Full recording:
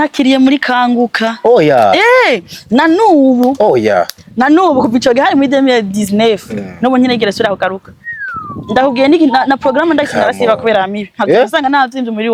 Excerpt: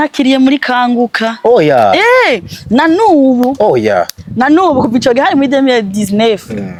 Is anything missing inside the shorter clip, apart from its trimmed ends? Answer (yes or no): no